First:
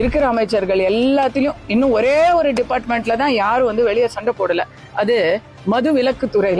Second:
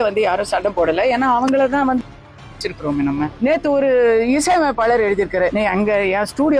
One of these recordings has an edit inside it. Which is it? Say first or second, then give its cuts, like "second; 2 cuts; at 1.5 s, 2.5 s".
second; 2 cuts; at 3.3 s, 5.5 s